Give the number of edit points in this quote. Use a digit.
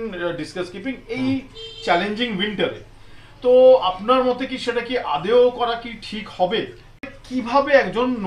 1